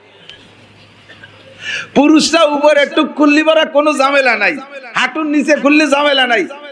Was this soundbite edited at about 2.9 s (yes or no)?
no